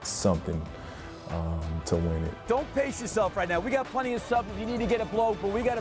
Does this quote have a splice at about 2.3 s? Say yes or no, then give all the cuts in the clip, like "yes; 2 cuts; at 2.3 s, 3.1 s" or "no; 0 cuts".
yes; 1 cut; at 2.3 s